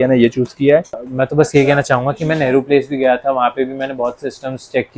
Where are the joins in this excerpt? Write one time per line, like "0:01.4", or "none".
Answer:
0:00.9